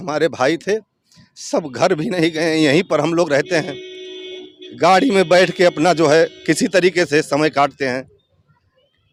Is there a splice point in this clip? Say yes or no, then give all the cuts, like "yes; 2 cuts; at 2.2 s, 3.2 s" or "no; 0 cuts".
no; 0 cuts